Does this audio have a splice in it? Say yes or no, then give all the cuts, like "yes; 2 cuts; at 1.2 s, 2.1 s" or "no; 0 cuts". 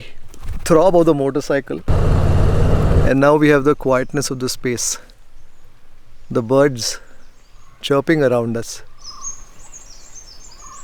yes; 1 cut; at 9.0 s